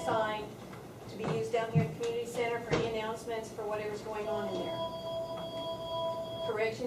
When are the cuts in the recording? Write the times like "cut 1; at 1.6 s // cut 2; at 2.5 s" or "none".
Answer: cut 1; at 3.2 s

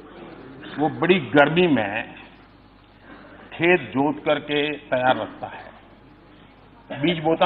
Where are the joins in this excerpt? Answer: none

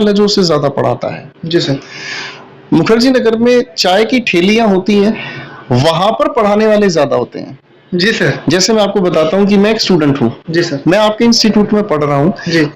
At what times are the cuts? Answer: none

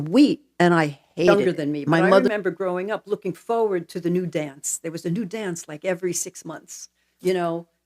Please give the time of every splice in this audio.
cut 1; at 2.2 s

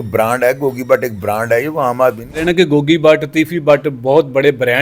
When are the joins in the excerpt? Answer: cut 1; at 2.5 s

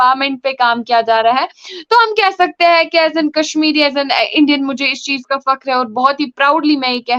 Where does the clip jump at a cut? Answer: none

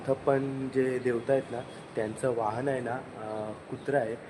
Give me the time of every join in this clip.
none

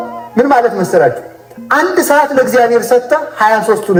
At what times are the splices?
none

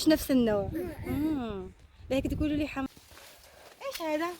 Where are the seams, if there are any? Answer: cut 1; at 2.9 s

